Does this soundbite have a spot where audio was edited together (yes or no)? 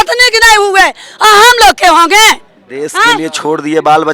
no